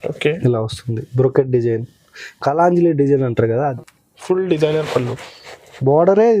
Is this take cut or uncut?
cut